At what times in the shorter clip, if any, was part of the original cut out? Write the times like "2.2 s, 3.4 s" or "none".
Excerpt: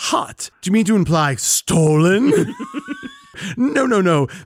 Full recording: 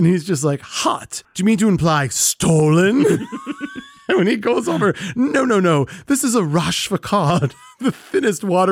3.3 s